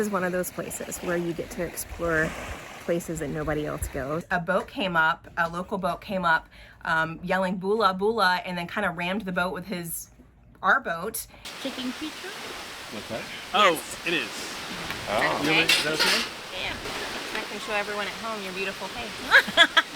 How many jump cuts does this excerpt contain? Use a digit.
3